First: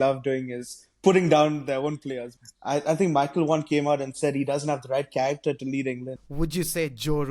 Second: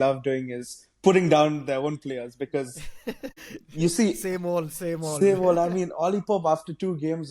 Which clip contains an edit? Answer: first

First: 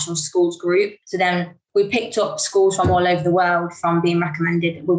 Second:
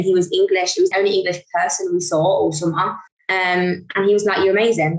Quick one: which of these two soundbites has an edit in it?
second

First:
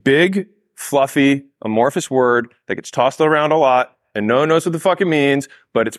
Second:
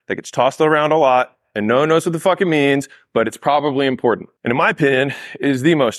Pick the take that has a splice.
second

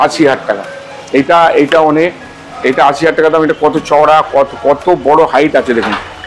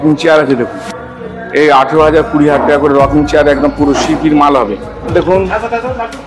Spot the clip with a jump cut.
second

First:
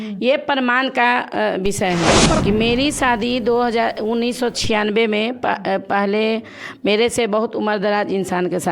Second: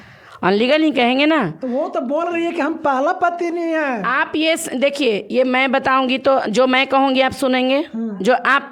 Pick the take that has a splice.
first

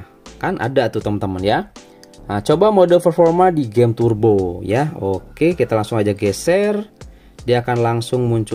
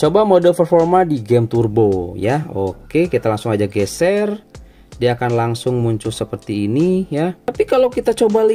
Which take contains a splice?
second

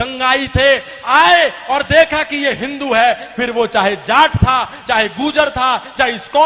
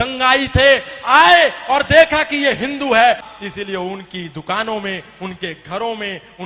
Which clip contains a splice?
second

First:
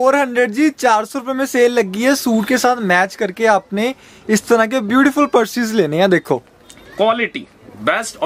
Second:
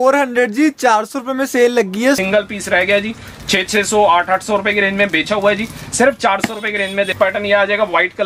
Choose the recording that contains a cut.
second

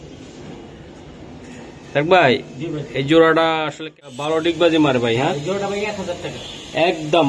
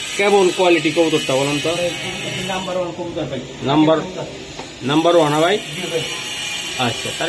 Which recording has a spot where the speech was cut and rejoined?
first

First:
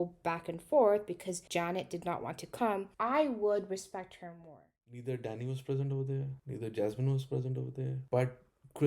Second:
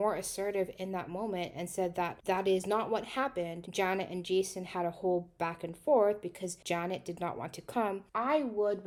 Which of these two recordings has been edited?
first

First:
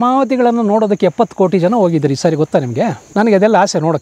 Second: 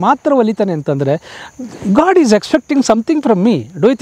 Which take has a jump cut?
first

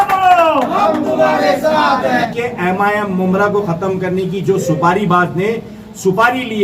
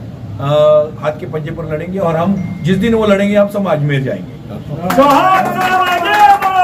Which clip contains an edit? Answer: first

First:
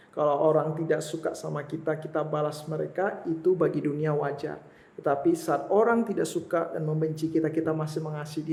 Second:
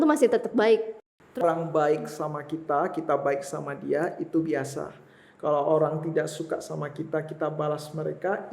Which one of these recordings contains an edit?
second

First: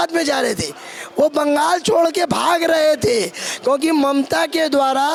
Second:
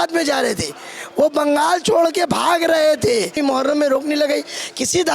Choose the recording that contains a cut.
second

